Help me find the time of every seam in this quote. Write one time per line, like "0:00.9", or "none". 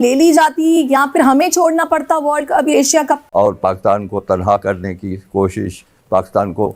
0:03.2